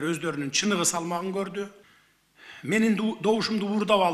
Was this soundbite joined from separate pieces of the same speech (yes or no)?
yes